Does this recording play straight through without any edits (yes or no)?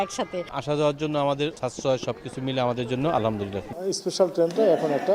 no